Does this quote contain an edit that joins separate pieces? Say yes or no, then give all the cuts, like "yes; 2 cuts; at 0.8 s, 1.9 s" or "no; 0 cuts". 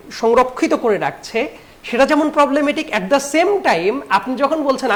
no; 0 cuts